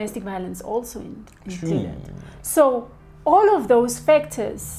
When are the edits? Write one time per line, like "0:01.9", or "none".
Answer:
0:01.6